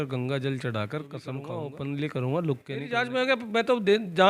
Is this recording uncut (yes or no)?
no